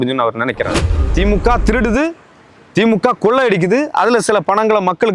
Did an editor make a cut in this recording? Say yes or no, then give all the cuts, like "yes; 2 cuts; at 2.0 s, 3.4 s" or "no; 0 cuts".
yes; 1 cut; at 1.1 s